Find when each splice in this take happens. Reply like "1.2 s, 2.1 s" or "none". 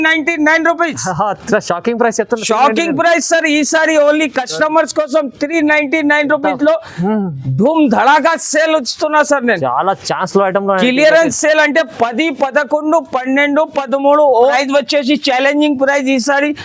14.5 s